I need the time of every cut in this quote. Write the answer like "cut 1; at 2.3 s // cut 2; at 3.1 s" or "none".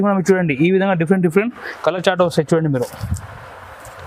none